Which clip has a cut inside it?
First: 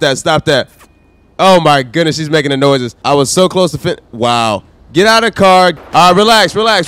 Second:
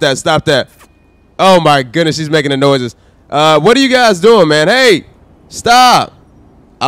first; 2 cuts; at 2.9 s, 5.8 s

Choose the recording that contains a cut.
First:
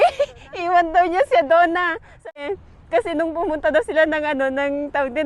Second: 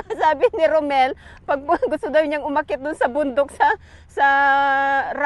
first; 1 cut; at 2.4 s

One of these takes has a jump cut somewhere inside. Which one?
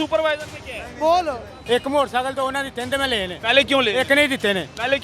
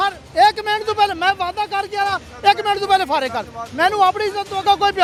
first; 1 cut; at 1.5 s

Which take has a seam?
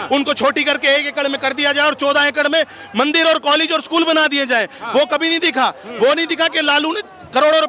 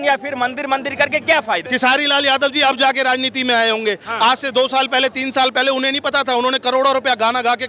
second; 1 cut; at 1.6 s

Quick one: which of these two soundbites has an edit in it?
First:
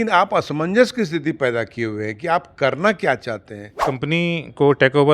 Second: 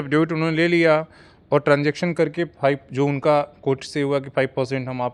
first; 1 cut; at 3.8 s

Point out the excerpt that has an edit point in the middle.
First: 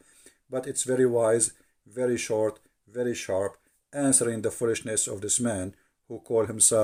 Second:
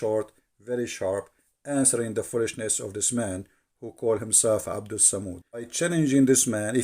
second; 1 cut; at 5.7 s

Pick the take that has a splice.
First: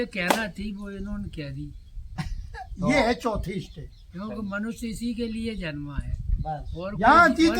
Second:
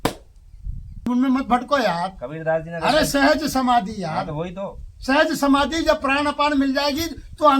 second; 1 cut; at 1.1 s

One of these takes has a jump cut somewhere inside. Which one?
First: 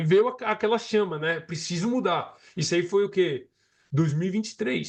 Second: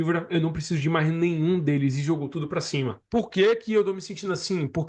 second; 1 cut; at 3.0 s

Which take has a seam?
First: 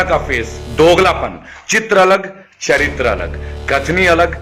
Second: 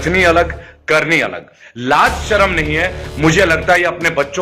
second; 1 cut; at 1.6 s

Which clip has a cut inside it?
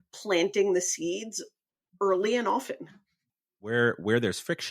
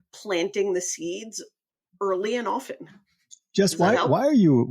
first; 1 cut; at 3.4 s

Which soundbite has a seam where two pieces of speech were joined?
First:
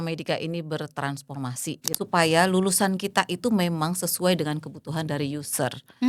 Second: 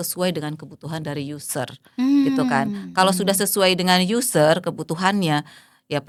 first; 1 cut; at 1.8 s

